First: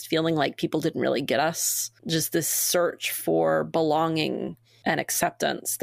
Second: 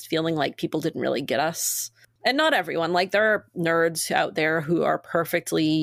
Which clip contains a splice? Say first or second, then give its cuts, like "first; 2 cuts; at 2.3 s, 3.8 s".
first; 2 cuts; at 1.9 s, 4.6 s